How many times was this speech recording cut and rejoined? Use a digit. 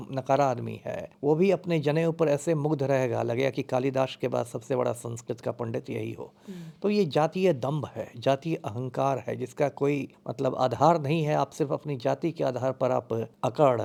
0